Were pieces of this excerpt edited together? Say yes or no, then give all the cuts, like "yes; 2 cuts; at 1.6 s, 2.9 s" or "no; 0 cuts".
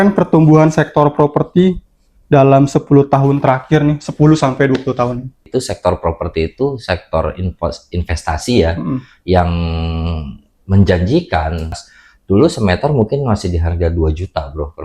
yes; 2 cuts; at 5.4 s, 11.8 s